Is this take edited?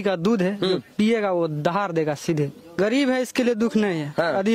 yes; 1 cut; at 2.6 s

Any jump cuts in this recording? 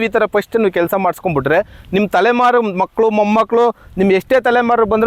no; 0 cuts

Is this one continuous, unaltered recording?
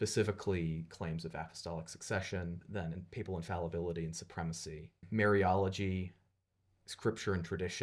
no; 2 cuts; at 2.6 s, 5.0 s

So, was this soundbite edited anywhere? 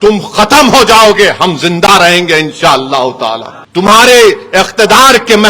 yes; 1 cut; at 3.5 s

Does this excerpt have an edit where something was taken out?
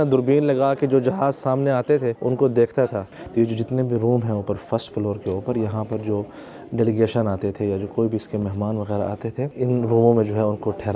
yes; 3 cuts; at 2.2 s, 3.1 s, 9.5 s

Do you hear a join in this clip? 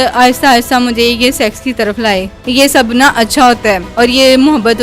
yes; 2 cuts; at 2.4 s, 3.9 s

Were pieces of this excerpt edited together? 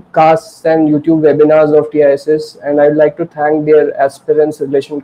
no; 0 cuts

